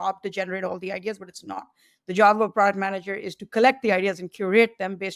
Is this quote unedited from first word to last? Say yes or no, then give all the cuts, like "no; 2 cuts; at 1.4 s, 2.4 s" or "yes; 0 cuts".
yes; 0 cuts